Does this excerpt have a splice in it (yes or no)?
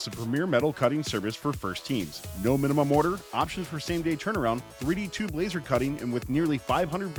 no